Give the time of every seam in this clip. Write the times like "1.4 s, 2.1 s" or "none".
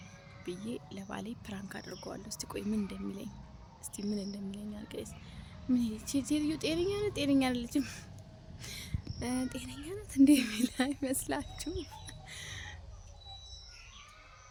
none